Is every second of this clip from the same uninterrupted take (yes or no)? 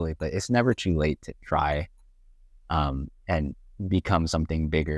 yes